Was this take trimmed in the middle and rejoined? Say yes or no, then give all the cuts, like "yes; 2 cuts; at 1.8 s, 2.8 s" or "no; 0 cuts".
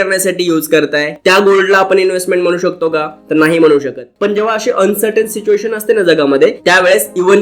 yes; 2 cuts; at 1.2 s, 4.1 s